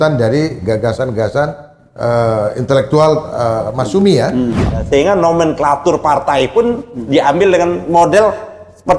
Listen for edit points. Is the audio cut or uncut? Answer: cut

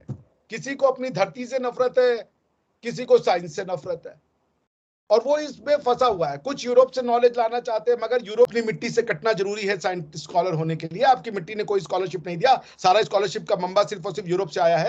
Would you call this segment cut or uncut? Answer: cut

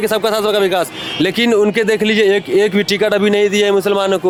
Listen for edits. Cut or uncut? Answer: uncut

